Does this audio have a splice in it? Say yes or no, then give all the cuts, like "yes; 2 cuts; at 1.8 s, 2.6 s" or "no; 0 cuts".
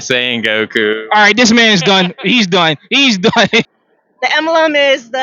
yes; 1 cut; at 3.6 s